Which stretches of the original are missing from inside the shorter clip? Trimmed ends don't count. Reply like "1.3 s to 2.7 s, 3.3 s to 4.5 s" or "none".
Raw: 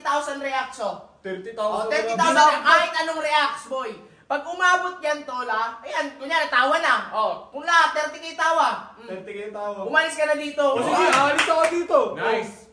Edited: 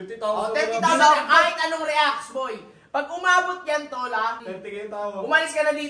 5.8 s to 9.1 s